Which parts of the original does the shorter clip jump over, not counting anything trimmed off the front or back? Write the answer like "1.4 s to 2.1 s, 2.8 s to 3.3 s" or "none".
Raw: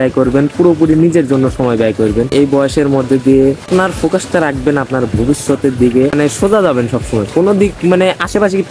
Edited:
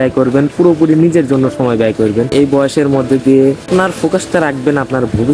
none